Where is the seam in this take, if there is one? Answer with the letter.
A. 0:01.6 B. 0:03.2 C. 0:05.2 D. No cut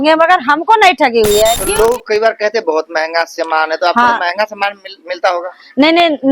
A